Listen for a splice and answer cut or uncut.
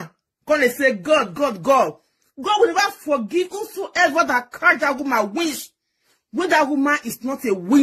uncut